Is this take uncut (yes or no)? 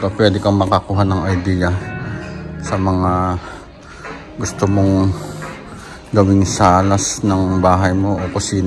yes